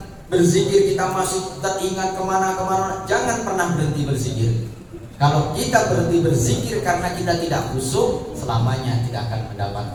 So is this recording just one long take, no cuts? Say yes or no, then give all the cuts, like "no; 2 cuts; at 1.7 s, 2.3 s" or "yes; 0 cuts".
yes; 0 cuts